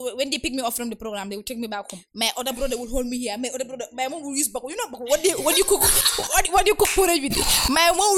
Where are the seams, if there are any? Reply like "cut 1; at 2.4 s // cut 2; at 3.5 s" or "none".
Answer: none

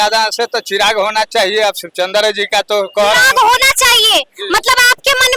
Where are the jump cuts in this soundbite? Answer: none

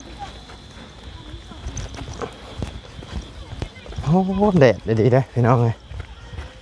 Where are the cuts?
none

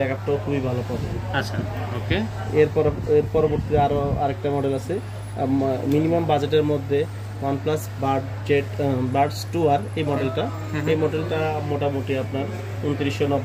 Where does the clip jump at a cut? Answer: none

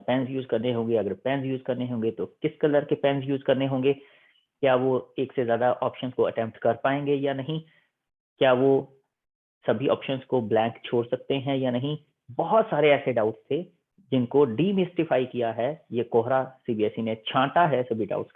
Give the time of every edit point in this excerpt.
none

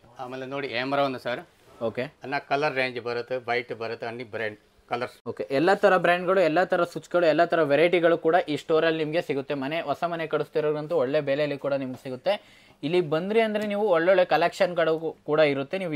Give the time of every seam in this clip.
none

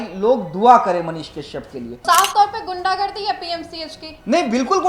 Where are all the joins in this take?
cut 1; at 2.0 s

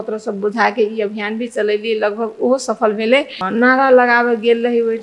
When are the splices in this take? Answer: cut 1; at 3.4 s

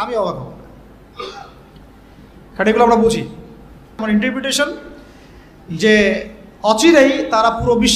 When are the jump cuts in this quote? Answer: cut 1; at 4.0 s

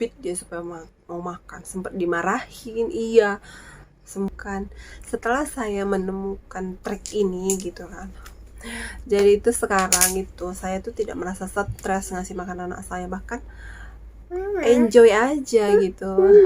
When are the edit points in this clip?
cut 1; at 4.7 s

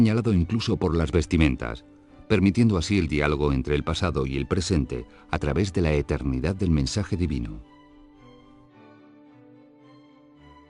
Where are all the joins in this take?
cut 1; at 8.4 s

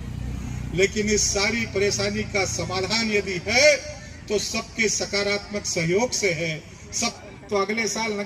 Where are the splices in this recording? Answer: cut 1; at 7.2 s

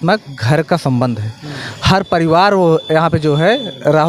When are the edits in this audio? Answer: none

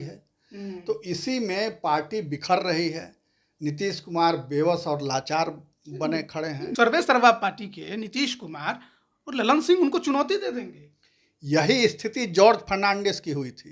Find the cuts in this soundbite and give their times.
cut 1; at 6.7 s

